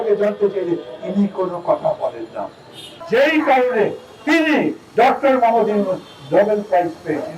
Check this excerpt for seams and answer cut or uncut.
cut